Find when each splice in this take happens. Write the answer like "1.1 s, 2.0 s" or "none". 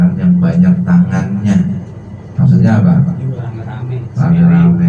none